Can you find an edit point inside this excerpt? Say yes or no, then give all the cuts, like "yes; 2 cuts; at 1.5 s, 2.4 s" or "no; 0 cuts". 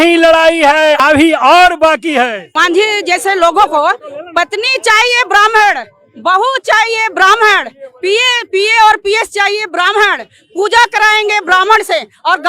yes; 2 cuts; at 1.0 s, 2.5 s